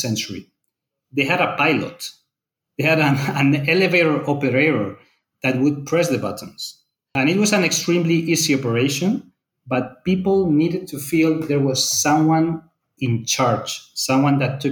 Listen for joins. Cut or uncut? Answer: cut